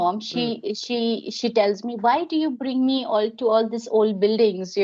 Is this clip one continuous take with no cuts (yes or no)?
yes